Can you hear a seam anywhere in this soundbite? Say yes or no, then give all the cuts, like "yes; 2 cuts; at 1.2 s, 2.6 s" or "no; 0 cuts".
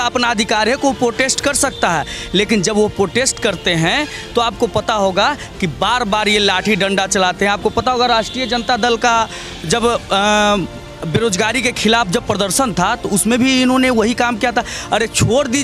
no; 0 cuts